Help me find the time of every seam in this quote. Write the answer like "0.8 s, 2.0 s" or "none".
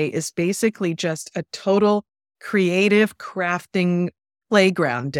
none